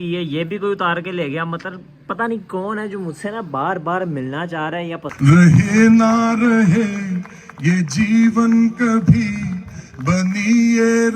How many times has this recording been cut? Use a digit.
1